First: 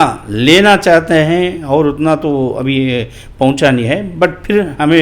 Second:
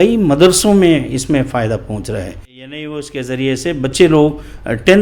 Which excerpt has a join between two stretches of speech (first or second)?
second